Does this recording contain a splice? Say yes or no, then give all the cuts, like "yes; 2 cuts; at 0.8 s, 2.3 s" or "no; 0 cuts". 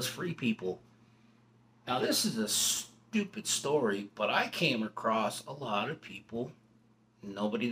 no; 0 cuts